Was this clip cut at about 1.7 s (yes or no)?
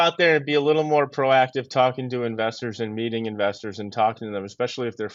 no